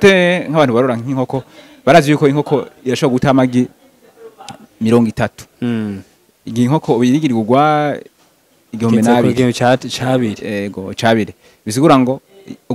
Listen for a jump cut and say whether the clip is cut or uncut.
uncut